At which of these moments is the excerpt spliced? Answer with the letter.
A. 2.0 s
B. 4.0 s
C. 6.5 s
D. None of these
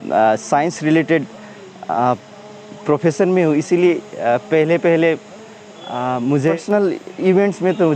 C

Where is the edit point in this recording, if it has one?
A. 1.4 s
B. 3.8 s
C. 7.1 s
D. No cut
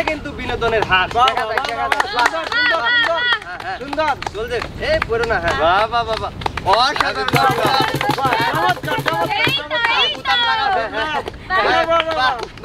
D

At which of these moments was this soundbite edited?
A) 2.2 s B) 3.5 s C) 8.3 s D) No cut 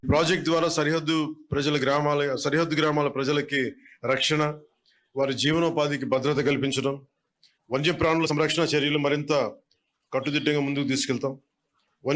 C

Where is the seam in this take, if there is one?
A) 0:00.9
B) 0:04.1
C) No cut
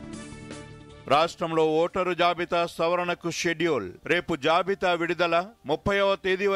A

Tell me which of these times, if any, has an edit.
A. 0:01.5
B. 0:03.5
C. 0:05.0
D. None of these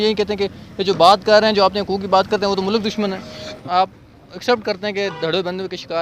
B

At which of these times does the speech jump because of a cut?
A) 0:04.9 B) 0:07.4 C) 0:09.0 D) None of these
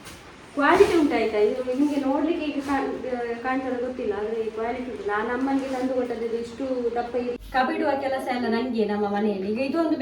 B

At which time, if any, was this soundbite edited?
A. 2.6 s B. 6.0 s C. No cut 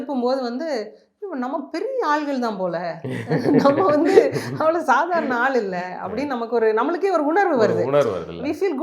C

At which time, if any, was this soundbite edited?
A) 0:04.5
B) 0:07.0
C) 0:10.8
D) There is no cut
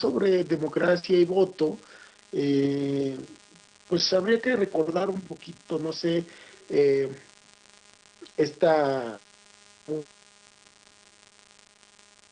B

